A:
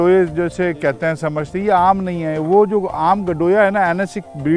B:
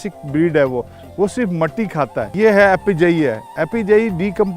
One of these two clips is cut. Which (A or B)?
B